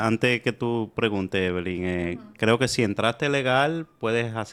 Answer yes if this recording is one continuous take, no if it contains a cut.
yes